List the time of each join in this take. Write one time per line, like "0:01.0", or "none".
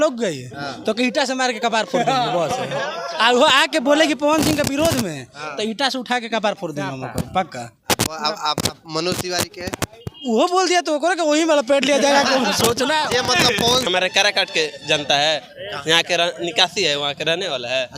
0:13.9